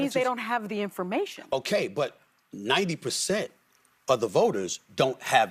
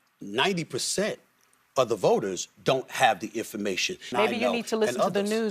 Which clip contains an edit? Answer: second; 1 cut; at 4.1 s

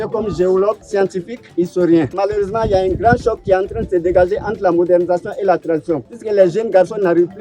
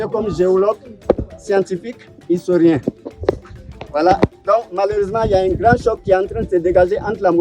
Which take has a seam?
first; 3 cuts; at 1.1 s, 2.1 s, 6.1 s

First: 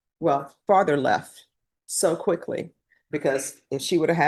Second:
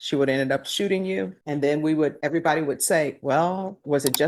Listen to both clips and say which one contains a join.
second; 2 cuts; at 1.4 s, 2.2 s

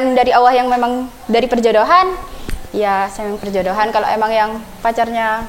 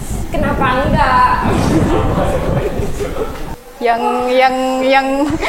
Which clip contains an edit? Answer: second; 1 cut; at 3.4 s

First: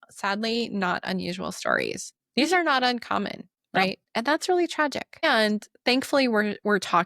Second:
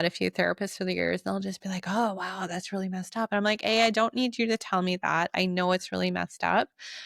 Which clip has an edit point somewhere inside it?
first; 3 cuts; at 2.1 s, 4.0 s, 5.2 s

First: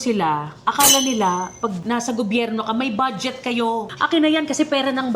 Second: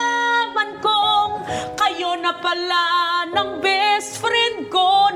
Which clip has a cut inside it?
first; 2 cuts; at 1.8 s, 3.9 s

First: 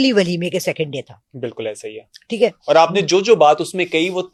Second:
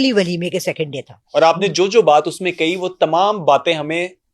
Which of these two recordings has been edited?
second; 1 cut; at 1.2 s

